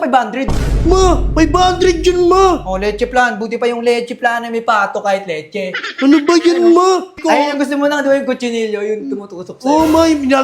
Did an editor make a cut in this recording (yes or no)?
yes